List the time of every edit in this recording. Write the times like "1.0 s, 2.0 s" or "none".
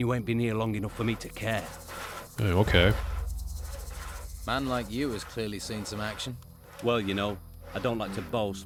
none

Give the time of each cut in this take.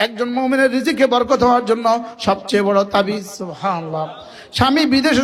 none

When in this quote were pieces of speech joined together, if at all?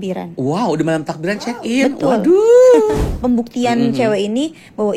3.0 s

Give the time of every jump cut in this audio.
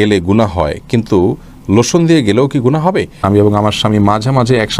3.2 s

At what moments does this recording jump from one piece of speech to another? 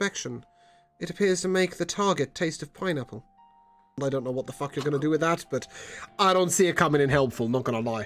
4.0 s

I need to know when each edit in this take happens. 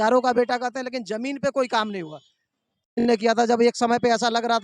3.0 s

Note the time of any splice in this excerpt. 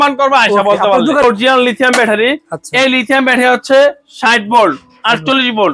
1.2 s

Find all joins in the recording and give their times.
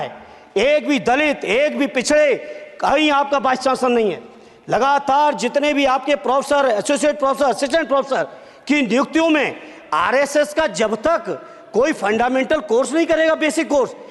none

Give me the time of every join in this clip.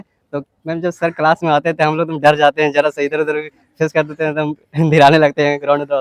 none

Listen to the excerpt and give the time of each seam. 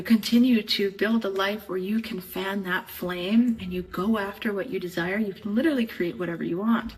none

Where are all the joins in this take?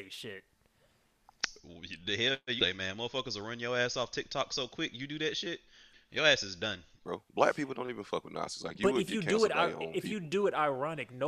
6.0 s, 7.0 s

